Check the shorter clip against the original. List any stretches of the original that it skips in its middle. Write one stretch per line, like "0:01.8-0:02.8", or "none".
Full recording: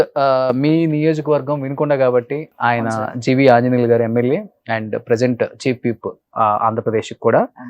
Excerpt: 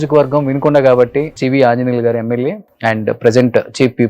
0:02.5-0:03.2